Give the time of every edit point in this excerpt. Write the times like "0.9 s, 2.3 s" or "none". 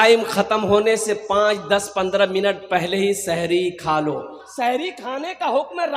4.4 s